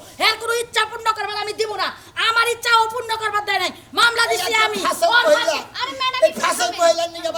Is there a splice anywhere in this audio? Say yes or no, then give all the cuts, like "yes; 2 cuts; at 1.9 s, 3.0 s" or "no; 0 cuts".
no; 0 cuts